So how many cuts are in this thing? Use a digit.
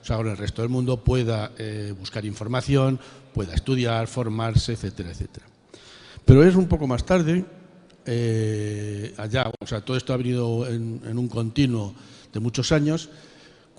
1